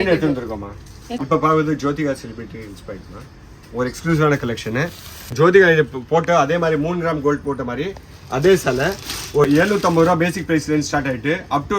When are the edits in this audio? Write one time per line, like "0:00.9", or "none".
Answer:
0:01.2
0:05.3
0:09.5

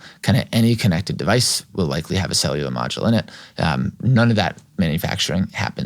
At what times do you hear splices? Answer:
0:03.9

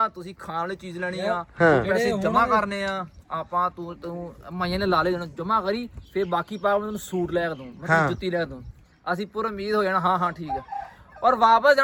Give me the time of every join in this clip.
none

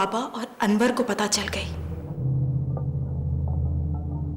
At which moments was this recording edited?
0:01.8

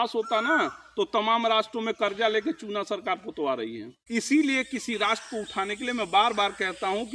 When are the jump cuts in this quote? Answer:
0:03.9

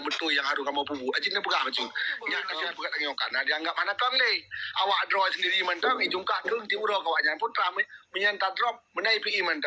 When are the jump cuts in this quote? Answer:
0:02.5

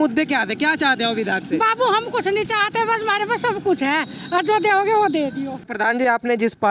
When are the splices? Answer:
0:05.5

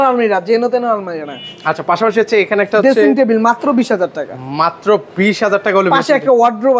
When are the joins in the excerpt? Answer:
none

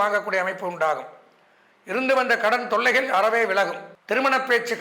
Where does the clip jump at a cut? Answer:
0:03.9

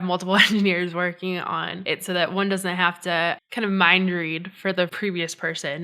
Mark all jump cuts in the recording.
0:01.7
0:03.5
0:04.9

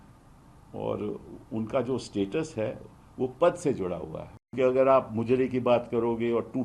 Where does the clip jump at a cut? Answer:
0:04.5

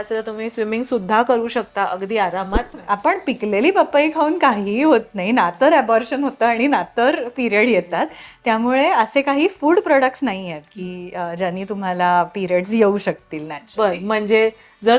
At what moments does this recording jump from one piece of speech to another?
0:02.7

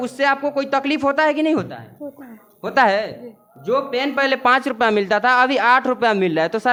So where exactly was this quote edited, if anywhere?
none

